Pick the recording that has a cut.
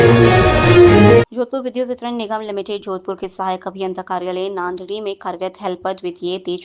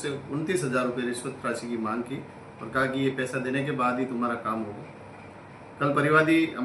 first; 1 cut; at 1.3 s

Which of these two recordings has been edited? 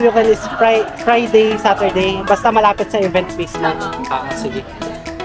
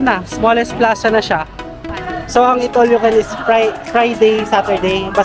second; 1 cut; at 1.8 s

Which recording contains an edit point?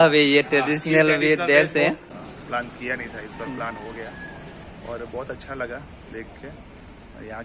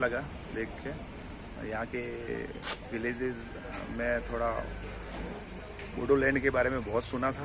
first; 1 cut; at 2.1 s

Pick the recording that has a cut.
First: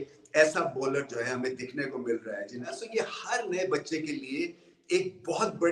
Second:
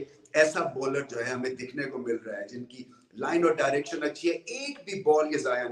first; 1 cut; at 2.8 s

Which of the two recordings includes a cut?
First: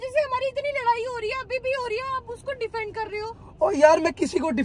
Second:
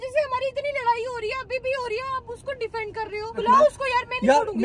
second; 1 cut; at 3.3 s

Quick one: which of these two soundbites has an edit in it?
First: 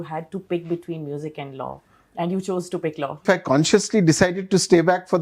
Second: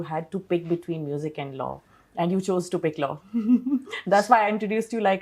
first; 1 cut; at 3.2 s

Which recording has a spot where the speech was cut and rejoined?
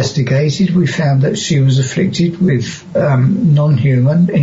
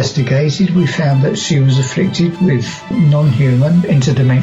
second; 1 cut; at 2.9 s

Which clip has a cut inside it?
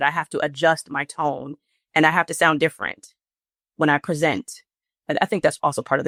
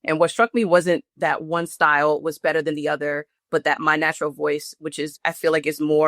second; 2 cuts; at 1.0 s, 5.1 s

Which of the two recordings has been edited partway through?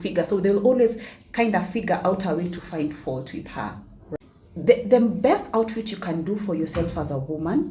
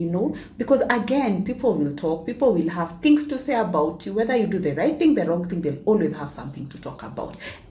first; 1 cut; at 3.9 s

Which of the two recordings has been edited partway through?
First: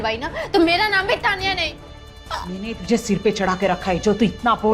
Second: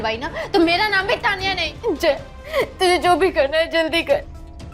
second; 1 cut; at 1.7 s

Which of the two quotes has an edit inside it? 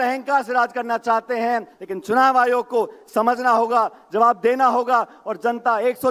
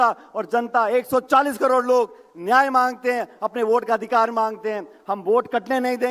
first; 1 cut; at 1.7 s

